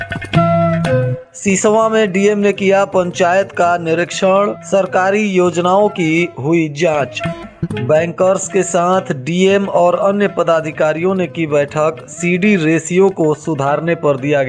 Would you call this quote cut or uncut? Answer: cut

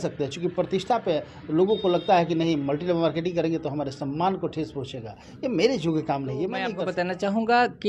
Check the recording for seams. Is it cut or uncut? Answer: cut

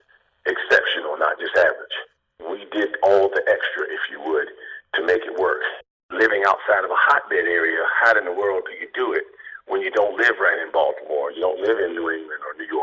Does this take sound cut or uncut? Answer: uncut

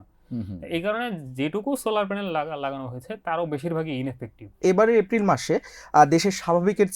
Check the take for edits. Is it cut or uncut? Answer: cut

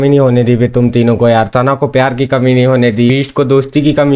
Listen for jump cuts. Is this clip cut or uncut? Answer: cut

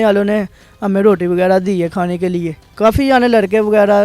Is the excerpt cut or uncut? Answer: cut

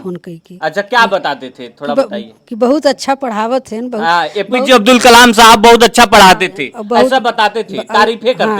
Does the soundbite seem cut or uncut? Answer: uncut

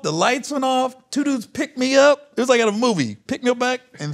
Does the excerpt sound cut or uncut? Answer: uncut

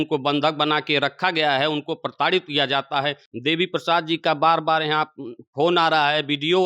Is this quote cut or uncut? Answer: cut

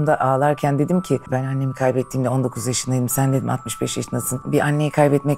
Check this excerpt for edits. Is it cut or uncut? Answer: cut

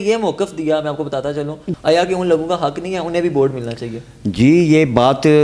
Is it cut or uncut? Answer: cut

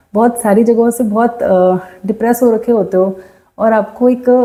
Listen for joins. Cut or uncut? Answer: uncut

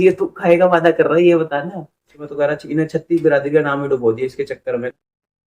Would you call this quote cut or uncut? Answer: cut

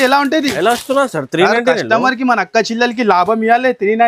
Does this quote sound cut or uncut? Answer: uncut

